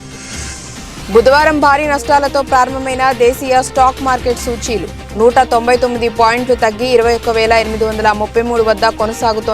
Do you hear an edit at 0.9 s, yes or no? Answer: yes